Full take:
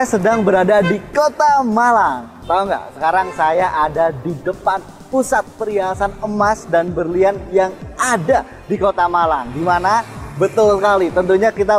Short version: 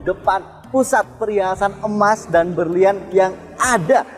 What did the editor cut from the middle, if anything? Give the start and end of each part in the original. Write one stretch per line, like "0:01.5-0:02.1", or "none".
none